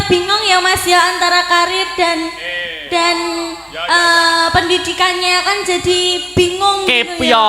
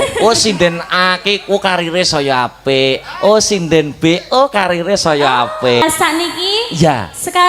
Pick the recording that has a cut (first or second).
second